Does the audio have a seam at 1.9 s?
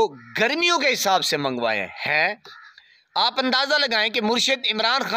no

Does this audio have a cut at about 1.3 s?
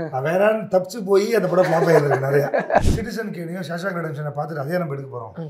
no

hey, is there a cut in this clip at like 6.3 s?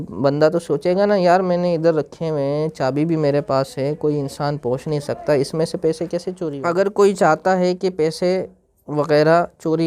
yes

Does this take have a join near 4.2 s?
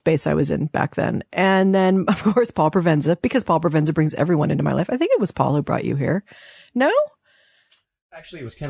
yes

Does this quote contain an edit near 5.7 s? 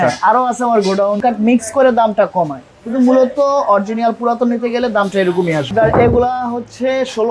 yes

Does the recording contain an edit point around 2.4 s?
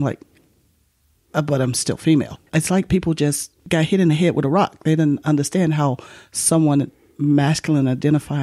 yes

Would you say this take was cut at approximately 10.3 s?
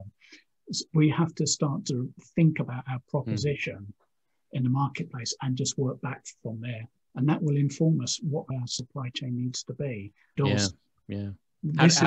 yes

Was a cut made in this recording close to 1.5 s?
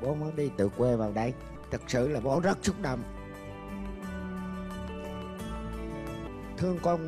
yes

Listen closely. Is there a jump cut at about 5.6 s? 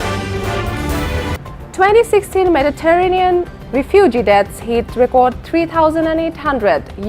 no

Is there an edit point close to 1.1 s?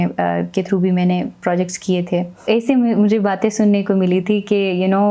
no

